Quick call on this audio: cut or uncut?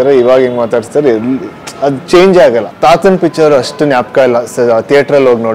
cut